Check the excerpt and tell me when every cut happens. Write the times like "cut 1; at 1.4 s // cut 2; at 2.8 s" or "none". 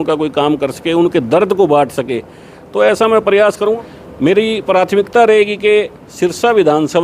cut 1; at 3.8 s